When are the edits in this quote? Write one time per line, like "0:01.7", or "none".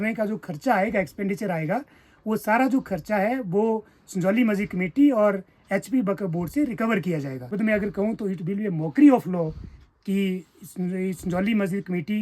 0:07.5